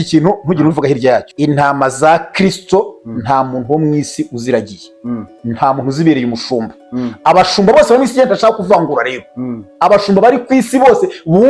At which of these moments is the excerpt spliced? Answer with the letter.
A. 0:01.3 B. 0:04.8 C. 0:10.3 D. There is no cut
A